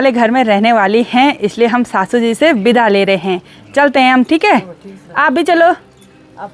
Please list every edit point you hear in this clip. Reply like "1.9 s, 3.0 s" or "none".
none